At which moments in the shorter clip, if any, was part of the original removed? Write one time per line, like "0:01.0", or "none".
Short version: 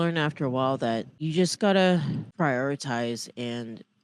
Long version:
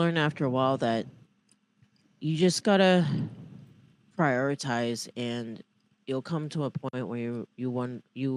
0:01.2
0:02.3